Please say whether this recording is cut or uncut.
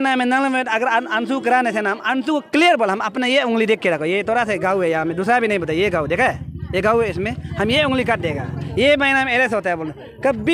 uncut